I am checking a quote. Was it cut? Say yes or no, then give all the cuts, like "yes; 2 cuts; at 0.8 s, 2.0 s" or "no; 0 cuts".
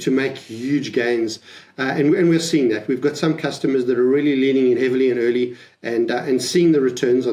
no; 0 cuts